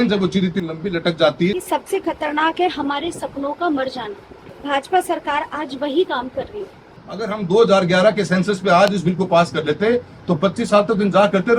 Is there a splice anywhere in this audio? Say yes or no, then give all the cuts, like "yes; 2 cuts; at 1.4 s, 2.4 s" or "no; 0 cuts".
yes; 2 cuts; at 1.7 s, 7.3 s